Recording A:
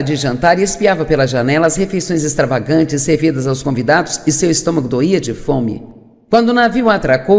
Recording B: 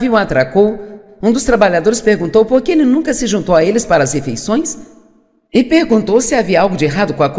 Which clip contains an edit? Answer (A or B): A